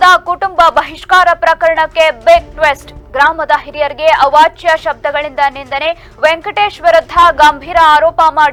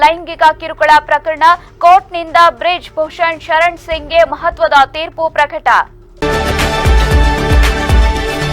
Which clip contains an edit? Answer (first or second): second